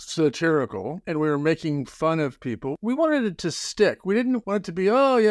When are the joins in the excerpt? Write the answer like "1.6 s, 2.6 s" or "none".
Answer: 1.0 s, 2.7 s, 4.4 s